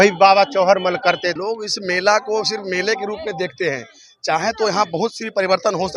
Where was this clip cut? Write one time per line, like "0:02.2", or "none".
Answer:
0:01.4